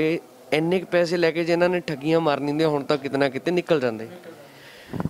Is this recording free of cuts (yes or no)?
yes